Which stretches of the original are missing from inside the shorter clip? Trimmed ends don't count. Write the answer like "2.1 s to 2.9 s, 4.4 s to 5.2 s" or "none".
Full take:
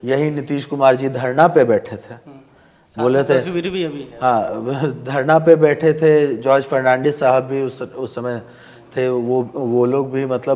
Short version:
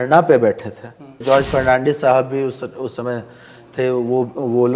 2.5 s to 6.4 s

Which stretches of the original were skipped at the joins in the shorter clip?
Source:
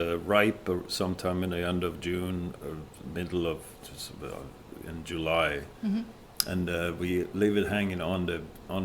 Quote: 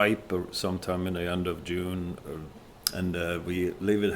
3.0 s to 6.2 s

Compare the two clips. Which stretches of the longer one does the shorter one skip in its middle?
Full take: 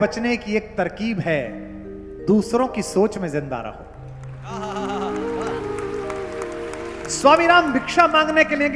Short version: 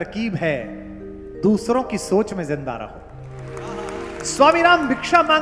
4.4 s to 6.4 s

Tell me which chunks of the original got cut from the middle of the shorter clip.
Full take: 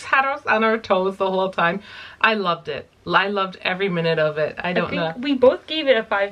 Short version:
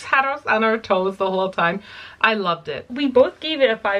2.9 s to 5.2 s

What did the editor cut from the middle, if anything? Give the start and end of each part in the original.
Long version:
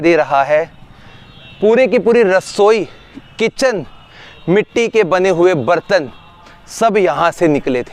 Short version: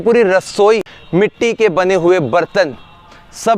3.0 s to 4.3 s

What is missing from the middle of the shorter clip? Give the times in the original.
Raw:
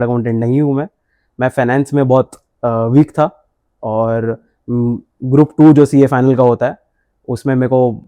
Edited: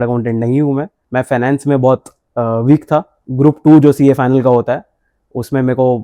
1.0 s to 1.2 s, 3.5 s to 5.1 s

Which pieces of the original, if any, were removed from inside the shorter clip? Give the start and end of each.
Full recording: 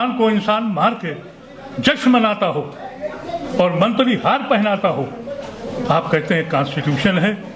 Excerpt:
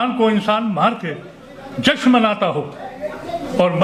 none

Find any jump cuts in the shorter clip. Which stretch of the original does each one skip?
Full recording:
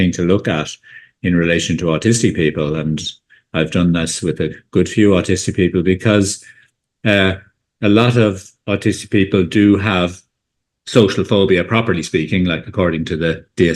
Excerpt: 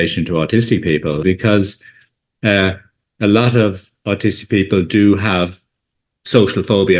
2.7 s to 5.8 s

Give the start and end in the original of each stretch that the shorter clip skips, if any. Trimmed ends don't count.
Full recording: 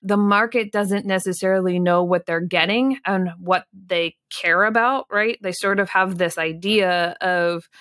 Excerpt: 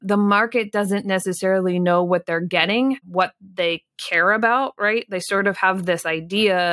3.0 s to 3.3 s

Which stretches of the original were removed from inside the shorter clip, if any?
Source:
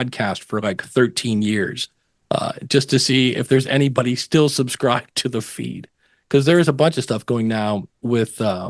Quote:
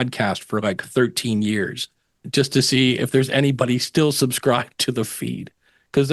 2.2 s to 2.5 s

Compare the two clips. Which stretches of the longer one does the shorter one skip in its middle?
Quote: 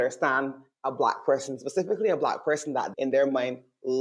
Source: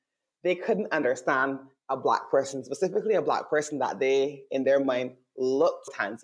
3.9 s to 4.4 s

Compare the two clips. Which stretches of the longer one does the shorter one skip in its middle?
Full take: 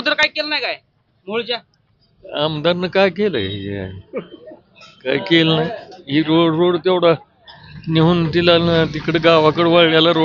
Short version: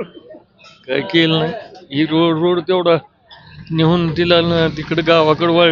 none

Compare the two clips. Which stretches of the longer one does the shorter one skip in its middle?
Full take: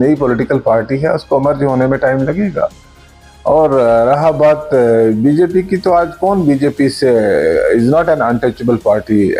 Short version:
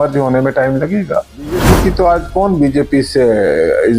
3.1 s to 5.5 s

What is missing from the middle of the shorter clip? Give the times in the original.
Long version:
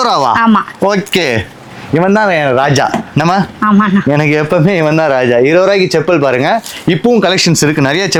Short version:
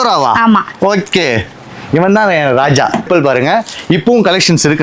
3.1 s to 6.0 s

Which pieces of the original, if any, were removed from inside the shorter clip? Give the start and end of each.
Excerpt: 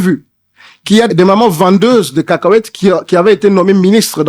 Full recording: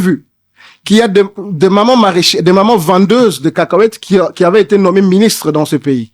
1.1 s to 2.4 s

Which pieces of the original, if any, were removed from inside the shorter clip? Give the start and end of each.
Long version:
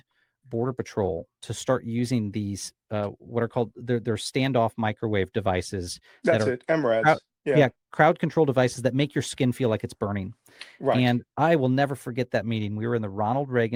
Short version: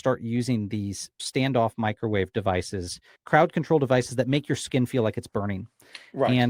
2.9 s to 4.2 s, 6.1 s to 7.8 s

